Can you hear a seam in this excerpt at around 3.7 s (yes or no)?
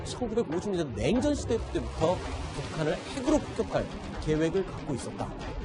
yes